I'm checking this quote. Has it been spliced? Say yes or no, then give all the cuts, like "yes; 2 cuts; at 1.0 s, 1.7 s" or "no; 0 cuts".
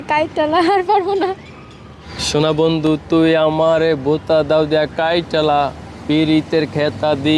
yes; 1 cut; at 2.1 s